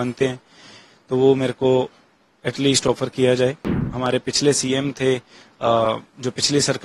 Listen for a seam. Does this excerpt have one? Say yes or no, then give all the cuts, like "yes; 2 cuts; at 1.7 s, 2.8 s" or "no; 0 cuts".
yes; 1 cut; at 3.7 s